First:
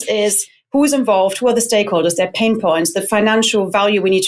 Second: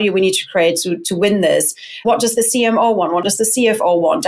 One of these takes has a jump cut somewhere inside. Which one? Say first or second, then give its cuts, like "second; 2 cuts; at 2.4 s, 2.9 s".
second; 2 cuts; at 2.0 s, 3.2 s